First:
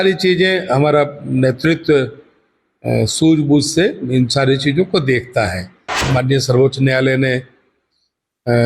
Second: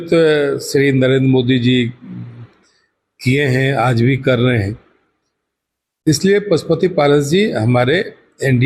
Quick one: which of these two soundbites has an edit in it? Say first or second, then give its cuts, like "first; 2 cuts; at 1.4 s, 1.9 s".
first; 1 cut; at 6.0 s